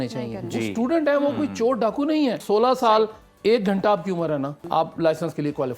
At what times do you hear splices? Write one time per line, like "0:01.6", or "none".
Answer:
0:02.4
0:04.6